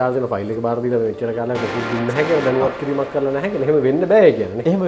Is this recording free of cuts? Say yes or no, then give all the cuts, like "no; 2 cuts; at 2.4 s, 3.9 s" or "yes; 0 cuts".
yes; 0 cuts